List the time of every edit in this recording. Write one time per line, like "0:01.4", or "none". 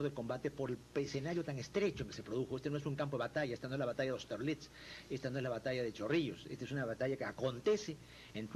none